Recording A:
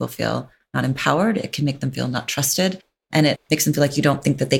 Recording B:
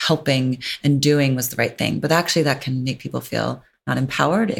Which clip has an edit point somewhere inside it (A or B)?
A